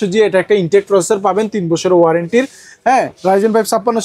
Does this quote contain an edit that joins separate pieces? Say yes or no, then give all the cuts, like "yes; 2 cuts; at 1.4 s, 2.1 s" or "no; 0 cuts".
no; 0 cuts